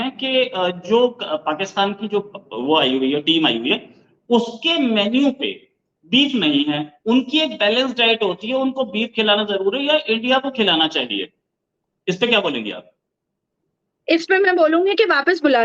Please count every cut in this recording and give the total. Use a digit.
0